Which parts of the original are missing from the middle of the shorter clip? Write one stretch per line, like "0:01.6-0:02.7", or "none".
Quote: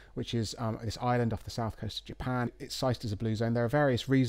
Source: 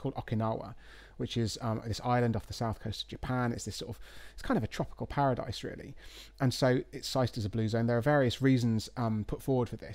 0:03.6-0:06.9